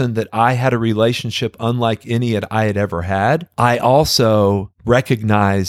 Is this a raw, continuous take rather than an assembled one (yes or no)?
no